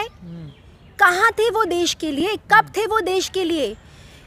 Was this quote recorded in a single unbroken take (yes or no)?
yes